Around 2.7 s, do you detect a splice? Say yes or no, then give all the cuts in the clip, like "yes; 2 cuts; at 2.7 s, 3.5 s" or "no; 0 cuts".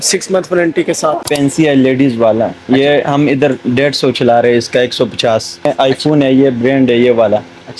no; 2 cuts; at 1.3 s, 5.6 s